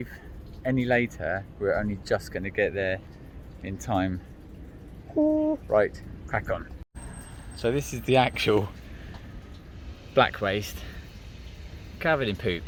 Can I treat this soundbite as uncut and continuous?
yes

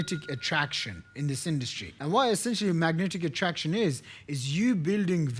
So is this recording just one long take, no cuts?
no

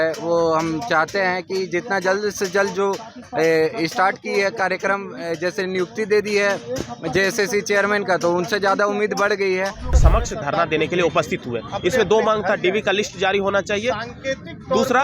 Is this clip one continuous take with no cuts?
no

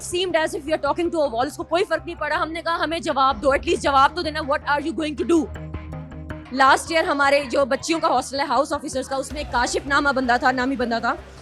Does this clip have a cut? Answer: no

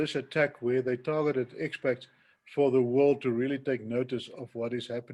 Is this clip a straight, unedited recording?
yes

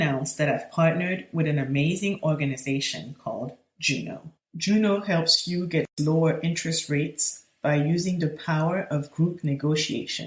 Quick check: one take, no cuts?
yes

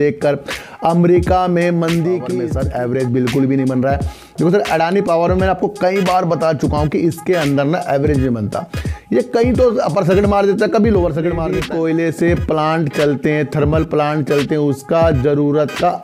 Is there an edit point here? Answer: yes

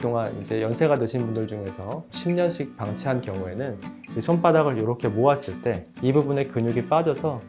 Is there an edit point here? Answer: yes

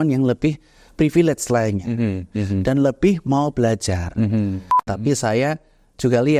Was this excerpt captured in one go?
no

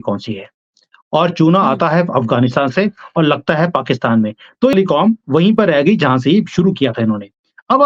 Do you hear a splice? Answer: yes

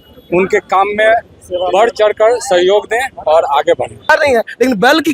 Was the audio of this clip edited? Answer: yes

